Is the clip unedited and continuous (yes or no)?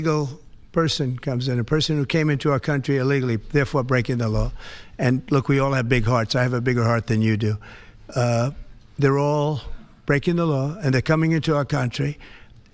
yes